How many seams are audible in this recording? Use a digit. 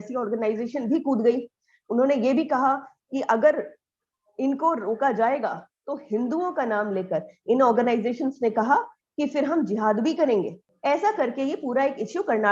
1